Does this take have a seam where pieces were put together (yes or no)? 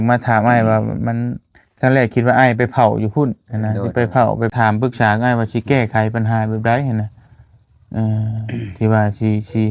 yes